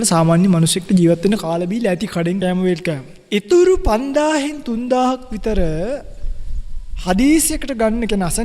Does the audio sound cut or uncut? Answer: cut